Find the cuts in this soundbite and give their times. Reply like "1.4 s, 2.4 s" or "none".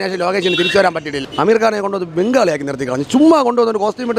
1.2 s